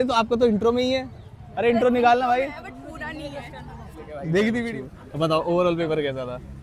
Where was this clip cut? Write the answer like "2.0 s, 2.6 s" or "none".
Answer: 4.7 s